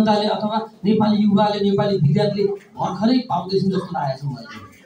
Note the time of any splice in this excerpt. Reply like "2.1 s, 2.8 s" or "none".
none